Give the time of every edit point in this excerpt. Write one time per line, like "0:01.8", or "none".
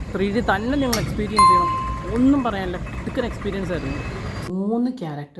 0:04.5